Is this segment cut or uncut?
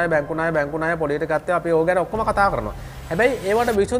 uncut